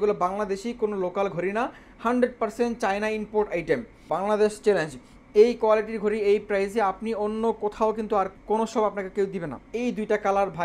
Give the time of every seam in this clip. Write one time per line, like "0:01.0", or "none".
0:04.1
0:08.4
0:09.6